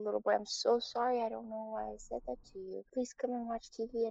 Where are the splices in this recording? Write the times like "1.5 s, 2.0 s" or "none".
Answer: 2.9 s